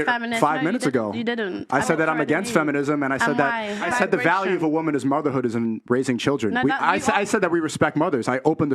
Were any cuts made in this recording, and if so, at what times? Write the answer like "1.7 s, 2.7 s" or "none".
3.9 s